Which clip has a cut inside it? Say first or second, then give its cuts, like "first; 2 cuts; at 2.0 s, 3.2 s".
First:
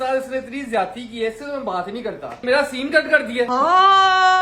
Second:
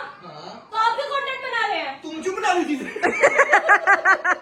first; 2 cuts; at 2.4 s, 3.5 s